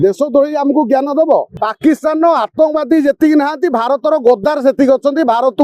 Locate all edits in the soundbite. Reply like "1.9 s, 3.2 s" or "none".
1.5 s

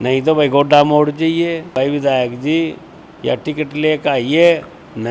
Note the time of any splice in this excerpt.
1.7 s

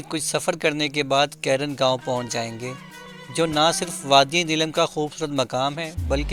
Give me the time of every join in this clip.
none

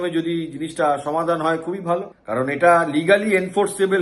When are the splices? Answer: 2.2 s

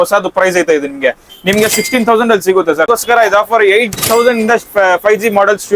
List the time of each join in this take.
2.9 s

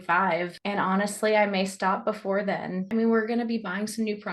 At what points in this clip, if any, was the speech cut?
2.9 s

